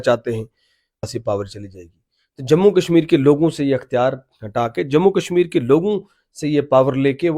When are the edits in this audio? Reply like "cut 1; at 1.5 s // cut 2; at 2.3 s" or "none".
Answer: cut 1; at 1.1 s